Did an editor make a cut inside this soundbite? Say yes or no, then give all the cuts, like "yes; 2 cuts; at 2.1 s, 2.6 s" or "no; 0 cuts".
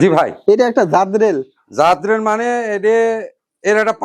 no; 0 cuts